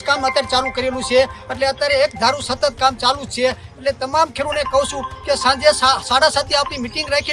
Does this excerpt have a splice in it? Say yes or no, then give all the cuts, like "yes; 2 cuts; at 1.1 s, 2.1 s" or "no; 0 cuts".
no; 0 cuts